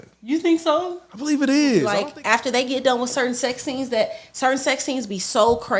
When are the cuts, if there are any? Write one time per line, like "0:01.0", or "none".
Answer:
0:01.9